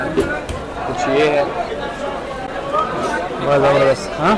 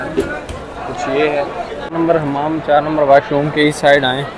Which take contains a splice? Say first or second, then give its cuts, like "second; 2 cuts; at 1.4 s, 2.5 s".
second; 1 cut; at 1.8 s